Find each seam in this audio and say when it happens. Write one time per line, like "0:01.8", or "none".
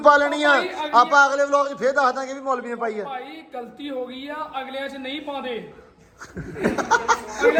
none